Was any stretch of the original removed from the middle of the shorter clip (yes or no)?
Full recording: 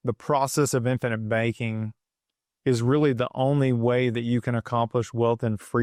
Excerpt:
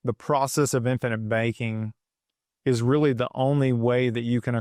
no